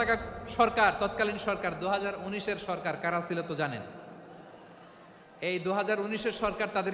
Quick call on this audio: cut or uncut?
uncut